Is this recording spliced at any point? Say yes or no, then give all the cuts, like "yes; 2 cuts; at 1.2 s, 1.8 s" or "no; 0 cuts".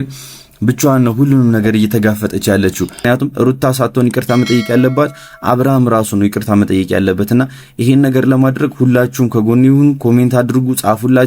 yes; 1 cut; at 3.0 s